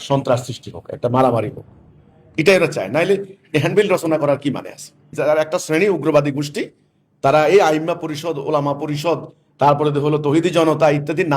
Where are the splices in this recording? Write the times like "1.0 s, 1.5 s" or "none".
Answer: 5.1 s